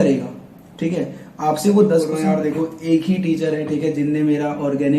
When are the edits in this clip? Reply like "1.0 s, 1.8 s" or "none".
2.1 s